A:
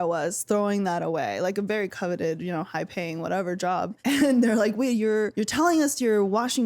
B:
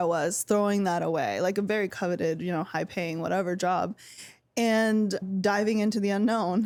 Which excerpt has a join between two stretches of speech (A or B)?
A